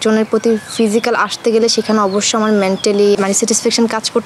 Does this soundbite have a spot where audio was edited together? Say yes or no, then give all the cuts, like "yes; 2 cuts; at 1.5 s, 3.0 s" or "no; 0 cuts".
yes; 1 cut; at 3.2 s